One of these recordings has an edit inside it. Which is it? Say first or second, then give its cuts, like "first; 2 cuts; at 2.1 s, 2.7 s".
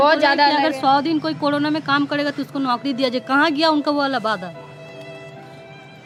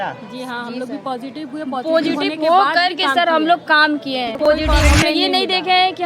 second; 1 cut; at 4.4 s